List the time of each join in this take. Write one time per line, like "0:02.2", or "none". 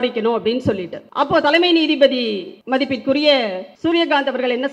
0:01.0
0:02.5
0:03.7